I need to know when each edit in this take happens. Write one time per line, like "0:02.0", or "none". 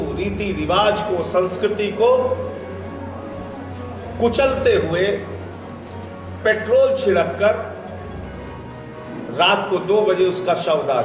none